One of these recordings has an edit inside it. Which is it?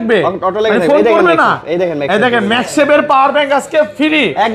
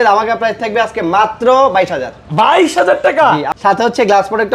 second; 1 cut; at 3.5 s

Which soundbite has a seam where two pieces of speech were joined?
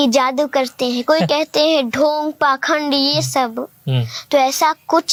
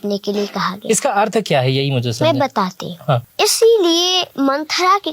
second; 2 cuts; at 3.3 s, 4.2 s

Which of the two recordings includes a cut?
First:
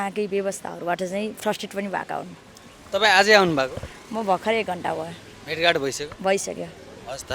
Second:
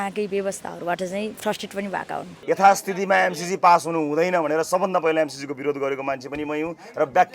second; 1 cut; at 2.3 s

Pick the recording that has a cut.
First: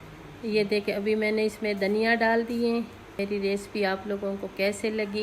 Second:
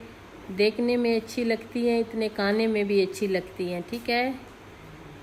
first; 1 cut; at 3.2 s

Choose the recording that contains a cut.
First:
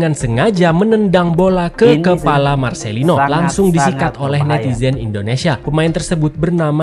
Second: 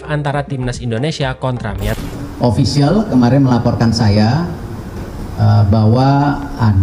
second; 1 cut; at 1.9 s

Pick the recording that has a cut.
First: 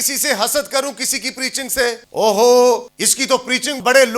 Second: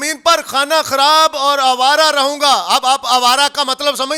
first; 2 cuts; at 2.0 s, 3.5 s

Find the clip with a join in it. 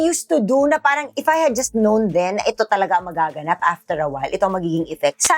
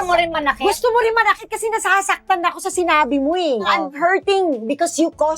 second; 1 cut; at 3.6 s

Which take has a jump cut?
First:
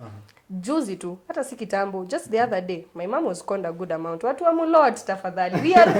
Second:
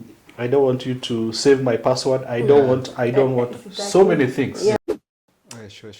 second; 1 cut; at 4.8 s

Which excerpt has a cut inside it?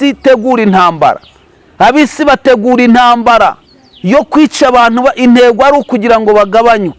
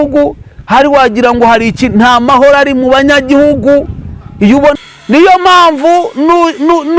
second; 1 cut; at 4.8 s

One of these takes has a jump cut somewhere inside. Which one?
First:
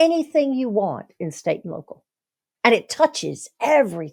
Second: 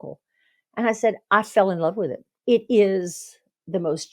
second; 1 cut; at 2.3 s

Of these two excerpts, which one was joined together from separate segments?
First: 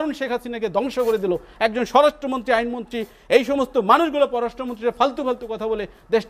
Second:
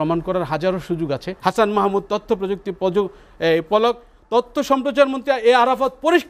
second; 1 cut; at 1.3 s

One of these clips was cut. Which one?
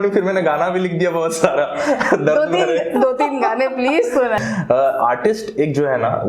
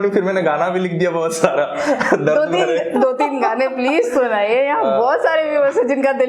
first; 1 cut; at 4.4 s

